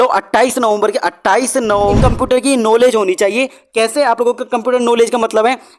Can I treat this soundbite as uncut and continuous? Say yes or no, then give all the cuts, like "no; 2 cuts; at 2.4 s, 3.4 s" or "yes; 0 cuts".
no; 1 cut; at 2.0 s